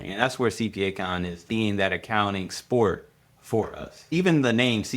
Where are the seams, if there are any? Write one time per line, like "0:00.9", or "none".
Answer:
0:01.4
0:03.9